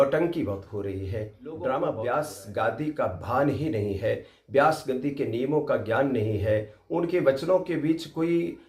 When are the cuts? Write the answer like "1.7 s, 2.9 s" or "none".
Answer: 2.0 s